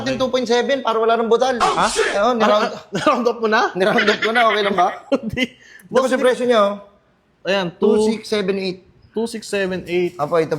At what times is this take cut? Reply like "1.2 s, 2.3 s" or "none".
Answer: none